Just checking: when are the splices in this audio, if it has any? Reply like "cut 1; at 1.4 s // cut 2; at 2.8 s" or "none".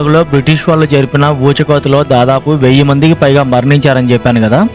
none